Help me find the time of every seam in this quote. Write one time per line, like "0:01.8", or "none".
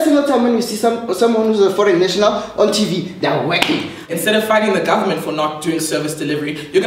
0:04.1